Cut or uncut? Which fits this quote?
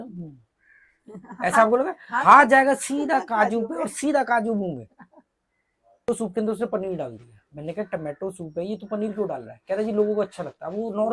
cut